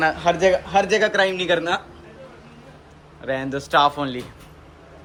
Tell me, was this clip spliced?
no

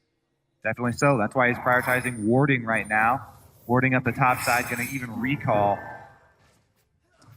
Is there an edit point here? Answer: yes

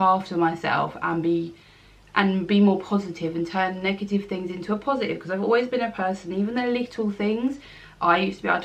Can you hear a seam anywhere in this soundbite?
no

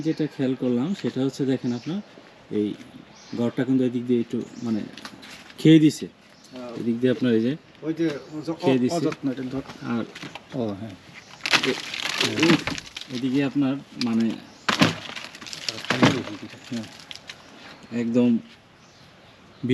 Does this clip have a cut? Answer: no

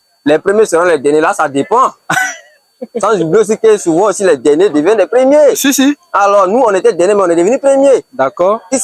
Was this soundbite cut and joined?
no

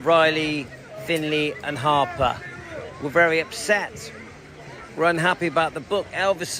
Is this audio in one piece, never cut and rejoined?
no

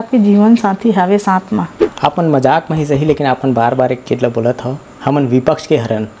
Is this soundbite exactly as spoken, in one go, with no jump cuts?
no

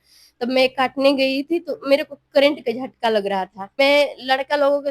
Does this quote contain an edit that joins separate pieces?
yes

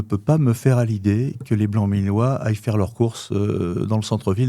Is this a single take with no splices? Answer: yes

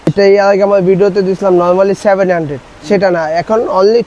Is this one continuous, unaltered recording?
yes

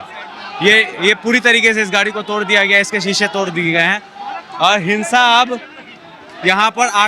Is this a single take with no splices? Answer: yes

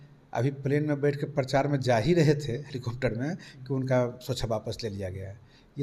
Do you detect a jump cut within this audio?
no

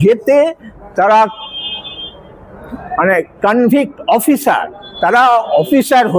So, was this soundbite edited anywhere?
no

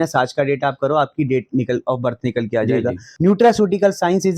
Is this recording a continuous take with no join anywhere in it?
no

